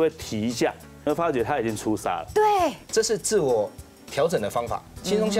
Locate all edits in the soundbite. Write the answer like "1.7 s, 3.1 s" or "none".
1.1 s, 2.8 s